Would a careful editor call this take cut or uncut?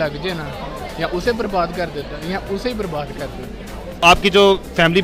uncut